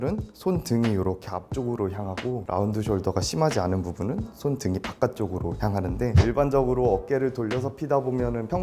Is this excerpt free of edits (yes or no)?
no